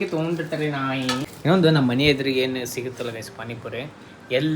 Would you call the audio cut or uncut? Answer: cut